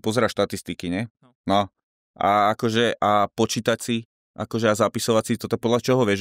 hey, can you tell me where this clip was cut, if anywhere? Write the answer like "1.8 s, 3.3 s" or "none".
none